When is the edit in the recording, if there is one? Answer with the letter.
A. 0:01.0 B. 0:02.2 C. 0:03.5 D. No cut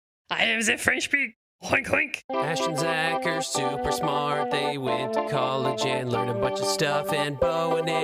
B